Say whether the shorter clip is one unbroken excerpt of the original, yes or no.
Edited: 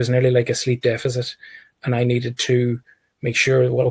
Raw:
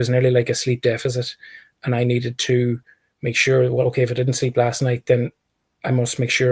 yes